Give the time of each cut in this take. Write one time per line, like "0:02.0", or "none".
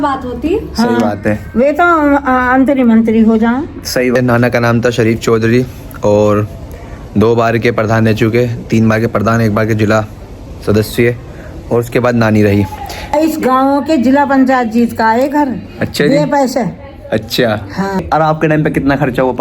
0:04.2
0:13.1
0:18.0